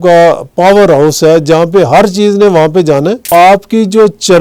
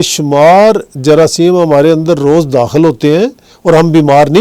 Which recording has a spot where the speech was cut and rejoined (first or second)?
first